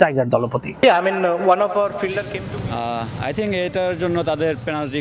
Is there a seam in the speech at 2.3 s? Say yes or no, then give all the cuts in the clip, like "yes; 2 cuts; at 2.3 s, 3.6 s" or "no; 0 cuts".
yes; 1 cut; at 2.3 s